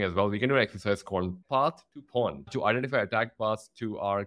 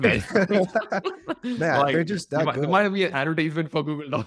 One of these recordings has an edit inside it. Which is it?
first; 2 cuts; at 1.4 s, 2.4 s

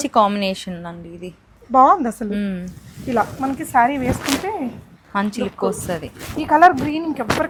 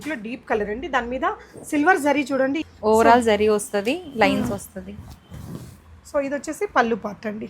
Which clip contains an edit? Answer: second; 1 cut; at 2.6 s

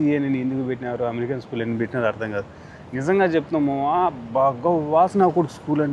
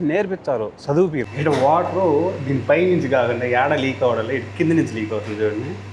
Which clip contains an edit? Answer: second; 1 cut; at 1.3 s

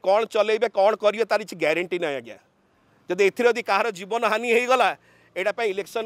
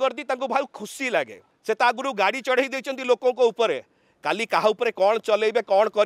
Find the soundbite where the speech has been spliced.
second; 1 cut; at 1.4 s

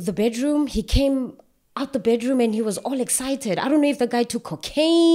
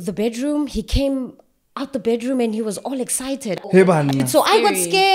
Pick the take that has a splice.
second; 1 cut; at 3.7 s

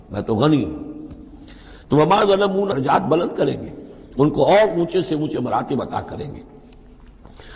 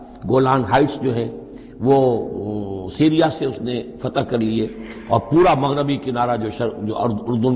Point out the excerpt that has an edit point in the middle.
first; 1 cut; at 2.7 s

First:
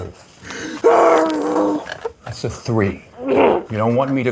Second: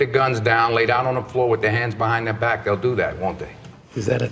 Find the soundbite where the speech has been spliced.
second; 1 cut; at 3.4 s

